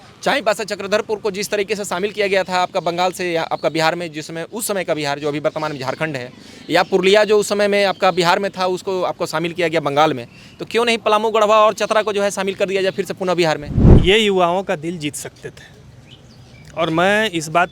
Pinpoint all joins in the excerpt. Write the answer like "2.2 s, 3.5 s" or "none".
13.7 s